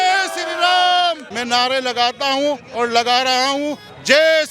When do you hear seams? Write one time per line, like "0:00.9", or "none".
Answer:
0:01.3